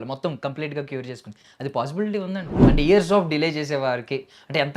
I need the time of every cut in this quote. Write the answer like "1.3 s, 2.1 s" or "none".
2.5 s